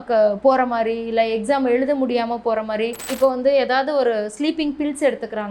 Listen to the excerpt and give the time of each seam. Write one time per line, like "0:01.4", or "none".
0:03.1